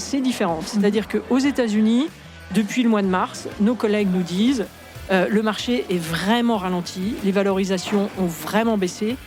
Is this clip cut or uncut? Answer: uncut